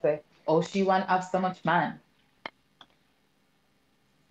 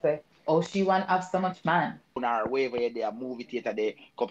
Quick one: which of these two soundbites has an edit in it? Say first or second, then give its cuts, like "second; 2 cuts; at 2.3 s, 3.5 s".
second; 1 cut; at 2.2 s